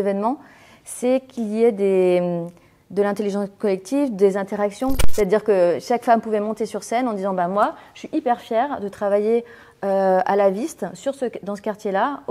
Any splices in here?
yes; 1 cut; at 5.0 s

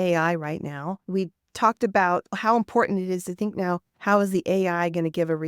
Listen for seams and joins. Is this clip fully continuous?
no; 2 cuts; at 0.9 s, 2.3 s

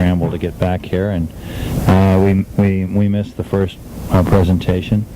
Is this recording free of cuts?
no; 1 cut; at 3.9 s

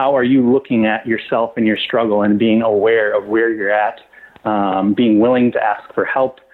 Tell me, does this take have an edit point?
no; 0 cuts

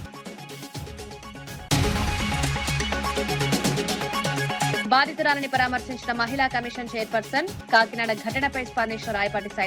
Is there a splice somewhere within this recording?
yes; 1 cut; at 1.4 s

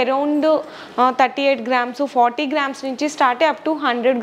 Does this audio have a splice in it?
no; 0 cuts

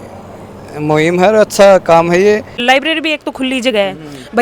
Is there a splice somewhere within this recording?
yes; 1 cut; at 2.5 s

